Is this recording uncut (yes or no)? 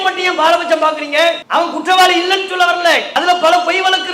no